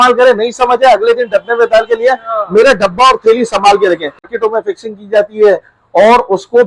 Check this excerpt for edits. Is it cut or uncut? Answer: cut